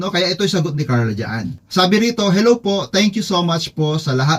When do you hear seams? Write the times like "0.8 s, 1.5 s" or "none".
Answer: 1.6 s